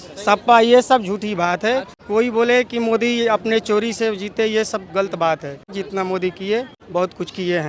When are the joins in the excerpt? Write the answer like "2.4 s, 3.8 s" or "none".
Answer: 2.0 s, 5.8 s, 6.8 s